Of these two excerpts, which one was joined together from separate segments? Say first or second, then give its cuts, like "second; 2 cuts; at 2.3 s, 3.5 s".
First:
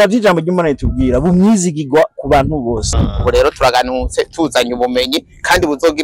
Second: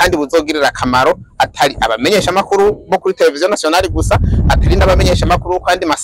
first; 1 cut; at 2.9 s